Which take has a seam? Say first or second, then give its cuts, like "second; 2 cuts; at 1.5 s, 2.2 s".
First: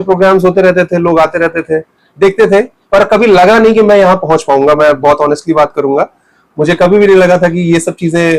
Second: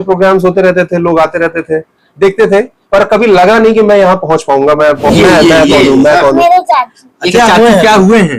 second; 1 cut; at 5.1 s